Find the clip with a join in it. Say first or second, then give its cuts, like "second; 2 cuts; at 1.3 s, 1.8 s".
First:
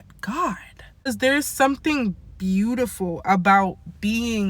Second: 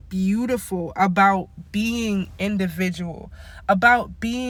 first; 1 cut; at 1.1 s